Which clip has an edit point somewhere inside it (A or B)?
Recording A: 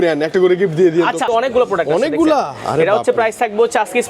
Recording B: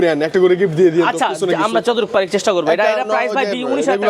A